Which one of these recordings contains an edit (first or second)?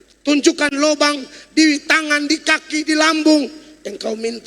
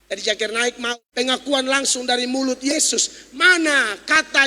second